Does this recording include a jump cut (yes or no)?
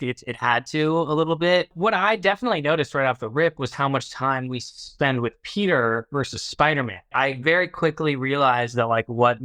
yes